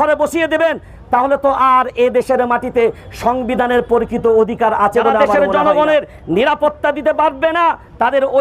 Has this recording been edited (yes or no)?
yes